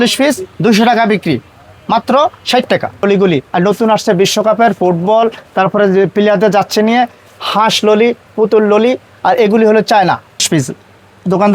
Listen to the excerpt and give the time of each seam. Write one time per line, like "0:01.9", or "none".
0:03.0
0:10.4